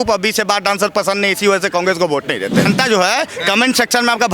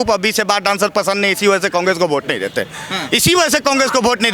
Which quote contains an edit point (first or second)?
first